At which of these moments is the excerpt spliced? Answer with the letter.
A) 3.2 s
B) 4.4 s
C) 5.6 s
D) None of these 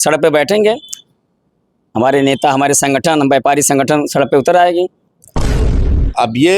C